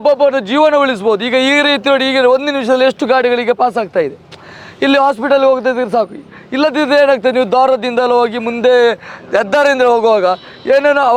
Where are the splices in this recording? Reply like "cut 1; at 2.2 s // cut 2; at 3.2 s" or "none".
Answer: none